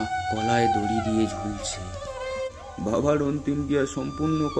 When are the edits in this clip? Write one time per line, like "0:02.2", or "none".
0:02.5